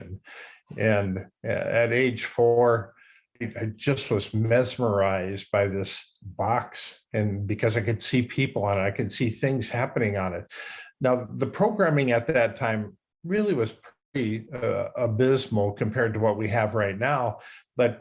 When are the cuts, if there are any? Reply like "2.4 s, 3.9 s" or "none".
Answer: 3.4 s, 6.0 s